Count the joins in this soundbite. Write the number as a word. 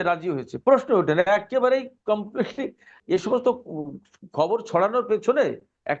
one